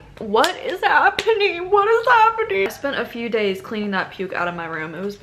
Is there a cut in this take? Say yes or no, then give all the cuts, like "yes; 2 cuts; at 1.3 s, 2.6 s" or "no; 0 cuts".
yes; 1 cut; at 2.7 s